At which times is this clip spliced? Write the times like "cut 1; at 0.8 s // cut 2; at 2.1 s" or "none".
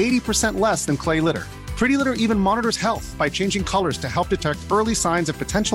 none